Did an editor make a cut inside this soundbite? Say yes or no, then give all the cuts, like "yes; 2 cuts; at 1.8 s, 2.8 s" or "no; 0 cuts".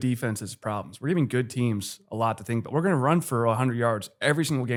no; 0 cuts